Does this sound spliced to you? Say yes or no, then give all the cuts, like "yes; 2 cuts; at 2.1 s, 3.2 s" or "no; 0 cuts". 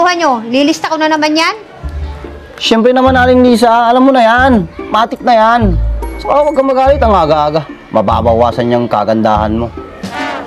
no; 0 cuts